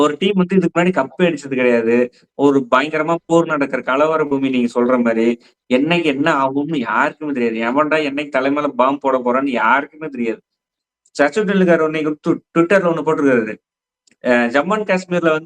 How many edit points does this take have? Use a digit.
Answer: 1